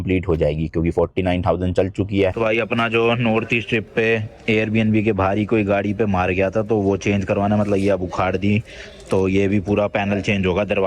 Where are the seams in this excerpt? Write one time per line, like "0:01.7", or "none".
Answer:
0:02.3